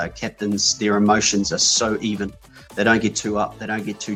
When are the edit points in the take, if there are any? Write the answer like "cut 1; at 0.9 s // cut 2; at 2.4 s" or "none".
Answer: none